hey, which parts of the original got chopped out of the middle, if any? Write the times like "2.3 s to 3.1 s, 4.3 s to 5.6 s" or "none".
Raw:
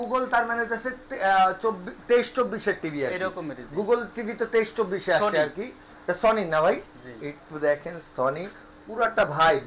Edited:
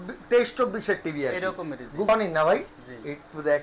3.8 s to 6.2 s